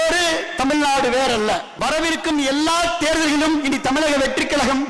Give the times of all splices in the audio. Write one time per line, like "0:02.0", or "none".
0:01.7